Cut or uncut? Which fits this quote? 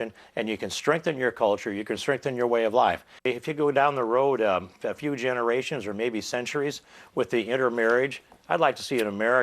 cut